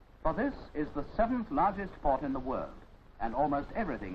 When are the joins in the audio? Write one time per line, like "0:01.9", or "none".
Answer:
0:01.8